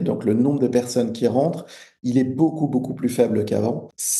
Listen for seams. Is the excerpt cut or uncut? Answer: uncut